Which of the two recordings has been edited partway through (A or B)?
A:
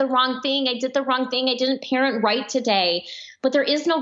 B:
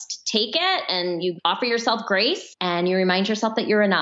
B